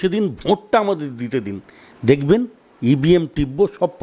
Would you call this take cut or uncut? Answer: uncut